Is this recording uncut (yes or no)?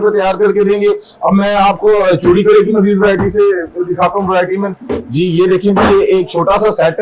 yes